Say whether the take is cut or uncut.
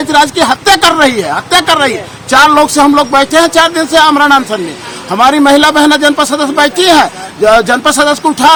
uncut